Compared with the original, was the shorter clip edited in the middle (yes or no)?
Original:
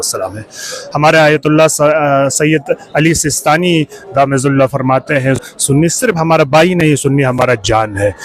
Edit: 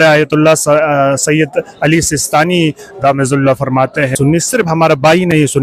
yes